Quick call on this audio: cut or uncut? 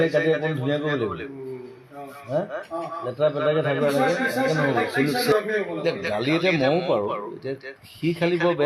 cut